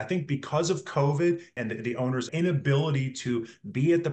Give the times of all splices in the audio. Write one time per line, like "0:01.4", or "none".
0:01.8